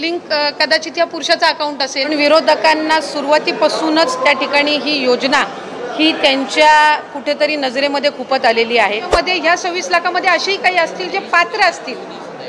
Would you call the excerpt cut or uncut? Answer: cut